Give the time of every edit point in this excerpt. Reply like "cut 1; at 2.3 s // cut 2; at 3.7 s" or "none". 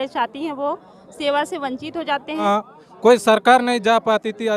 cut 1; at 2.4 s